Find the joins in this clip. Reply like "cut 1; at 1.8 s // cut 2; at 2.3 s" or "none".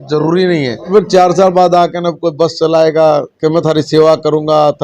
cut 1; at 0.9 s